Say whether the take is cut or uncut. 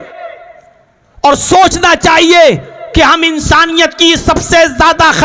uncut